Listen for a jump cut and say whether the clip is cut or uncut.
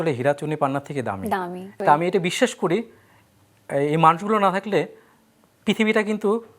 cut